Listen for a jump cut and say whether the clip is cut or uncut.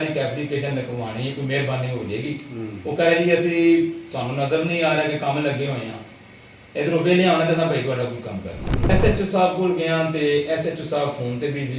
cut